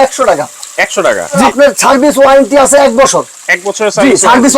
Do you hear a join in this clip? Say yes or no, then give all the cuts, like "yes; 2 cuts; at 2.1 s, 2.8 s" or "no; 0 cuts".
yes; 1 cut; at 1.4 s